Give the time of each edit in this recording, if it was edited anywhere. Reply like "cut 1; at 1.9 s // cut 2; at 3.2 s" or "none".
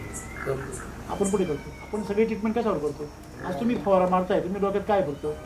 cut 1; at 1.7 s

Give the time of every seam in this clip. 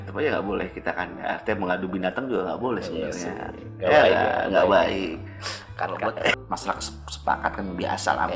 cut 1; at 6.3 s

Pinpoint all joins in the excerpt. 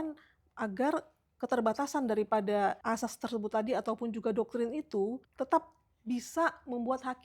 cut 1; at 2.8 s // cut 2; at 5.2 s

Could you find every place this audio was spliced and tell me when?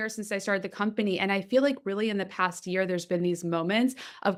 none

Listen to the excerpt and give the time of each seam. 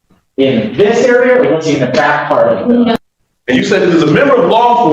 cut 1; at 3.0 s

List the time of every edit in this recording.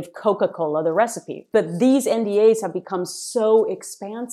cut 1; at 1.4 s

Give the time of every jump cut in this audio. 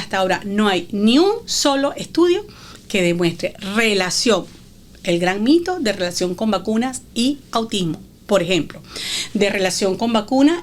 none

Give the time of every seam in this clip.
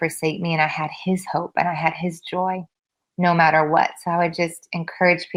none

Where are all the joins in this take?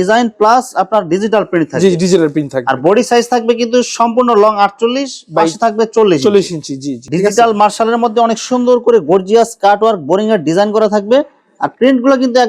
cut 1; at 7.1 s

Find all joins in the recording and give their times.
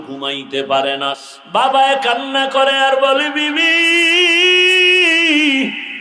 cut 1; at 1.2 s

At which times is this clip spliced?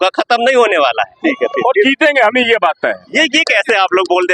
cut 1; at 1.1 s

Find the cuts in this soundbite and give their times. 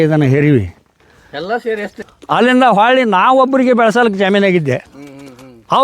cut 1; at 2.0 s

